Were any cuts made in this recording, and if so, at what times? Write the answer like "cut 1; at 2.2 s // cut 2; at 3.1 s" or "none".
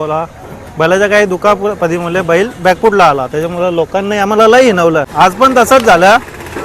cut 1; at 5.1 s